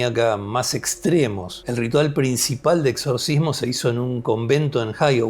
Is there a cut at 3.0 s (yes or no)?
no